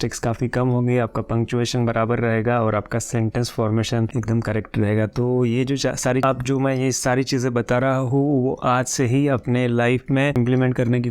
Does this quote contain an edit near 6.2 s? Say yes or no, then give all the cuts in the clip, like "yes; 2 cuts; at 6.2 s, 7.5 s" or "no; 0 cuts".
yes; 1 cut; at 6.2 s